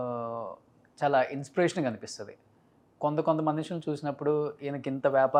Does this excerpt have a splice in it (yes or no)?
no